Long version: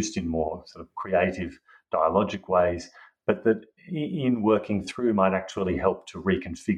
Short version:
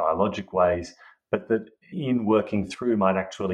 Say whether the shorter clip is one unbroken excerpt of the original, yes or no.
no